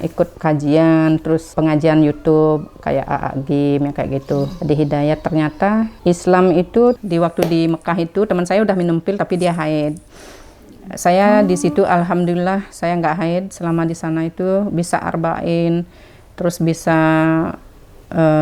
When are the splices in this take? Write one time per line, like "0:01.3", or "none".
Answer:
0:07.0